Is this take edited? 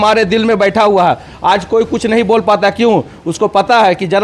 no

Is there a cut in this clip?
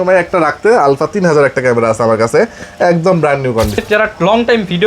yes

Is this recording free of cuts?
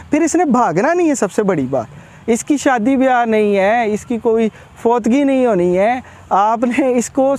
yes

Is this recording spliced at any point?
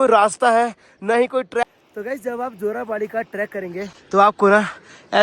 yes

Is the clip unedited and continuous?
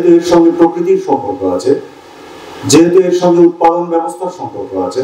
yes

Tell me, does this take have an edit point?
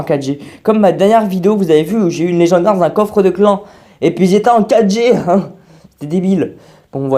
yes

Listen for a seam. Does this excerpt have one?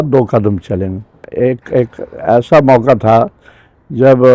yes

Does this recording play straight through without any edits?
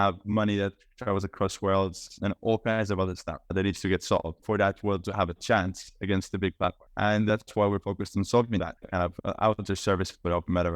no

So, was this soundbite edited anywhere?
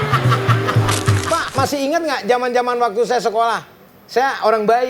yes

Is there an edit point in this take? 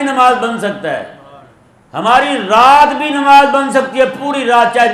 no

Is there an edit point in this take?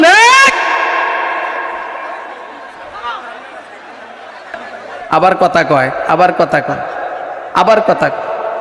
yes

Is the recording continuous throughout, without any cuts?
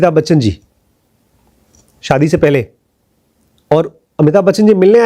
yes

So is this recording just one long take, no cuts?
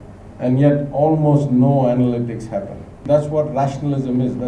no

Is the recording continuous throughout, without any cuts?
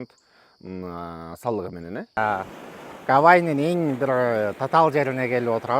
no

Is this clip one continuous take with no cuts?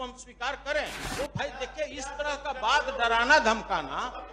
no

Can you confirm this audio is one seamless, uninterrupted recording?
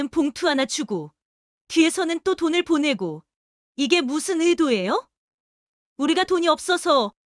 yes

